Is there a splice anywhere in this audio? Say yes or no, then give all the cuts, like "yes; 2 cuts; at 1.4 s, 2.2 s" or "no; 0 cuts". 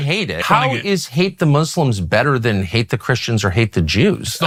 no; 0 cuts